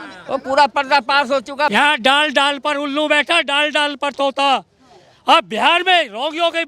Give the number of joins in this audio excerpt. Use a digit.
1